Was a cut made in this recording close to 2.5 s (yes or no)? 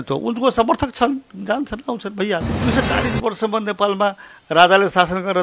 yes